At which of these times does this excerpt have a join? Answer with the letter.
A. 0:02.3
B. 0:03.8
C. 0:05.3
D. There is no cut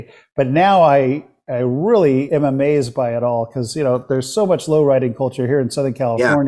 A